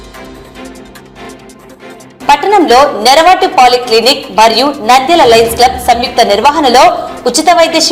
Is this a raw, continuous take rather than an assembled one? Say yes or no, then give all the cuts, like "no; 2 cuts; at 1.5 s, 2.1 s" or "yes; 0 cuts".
yes; 0 cuts